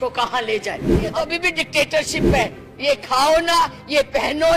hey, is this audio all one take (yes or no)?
no